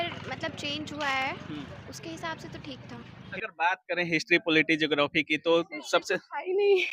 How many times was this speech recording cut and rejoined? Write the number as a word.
one